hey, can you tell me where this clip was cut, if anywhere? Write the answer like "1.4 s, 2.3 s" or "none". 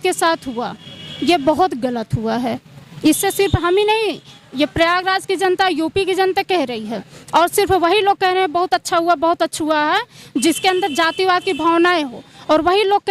none